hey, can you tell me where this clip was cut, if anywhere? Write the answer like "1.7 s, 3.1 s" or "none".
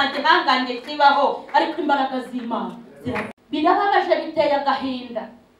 3.3 s